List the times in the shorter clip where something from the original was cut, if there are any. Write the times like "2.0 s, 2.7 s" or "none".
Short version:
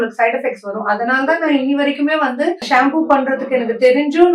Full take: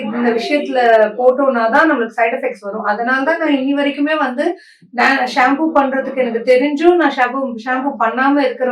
2.6 s